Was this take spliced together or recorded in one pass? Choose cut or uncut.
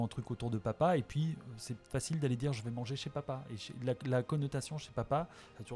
uncut